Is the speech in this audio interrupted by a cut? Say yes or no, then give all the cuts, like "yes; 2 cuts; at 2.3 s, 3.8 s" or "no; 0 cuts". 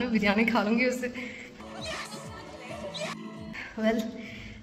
no; 0 cuts